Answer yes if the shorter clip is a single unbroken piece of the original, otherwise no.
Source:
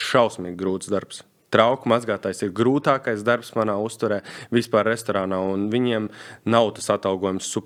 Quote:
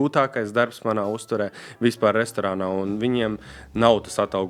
yes